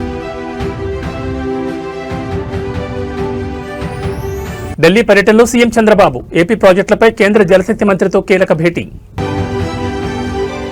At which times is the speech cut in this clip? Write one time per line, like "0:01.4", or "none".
none